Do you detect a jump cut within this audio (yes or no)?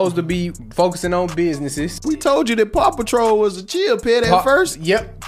yes